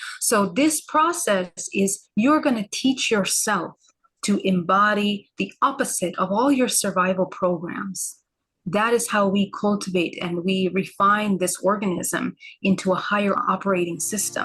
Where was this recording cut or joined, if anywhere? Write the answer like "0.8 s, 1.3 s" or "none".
13.4 s